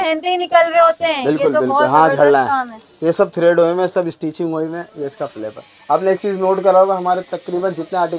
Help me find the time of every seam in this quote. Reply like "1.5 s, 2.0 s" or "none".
none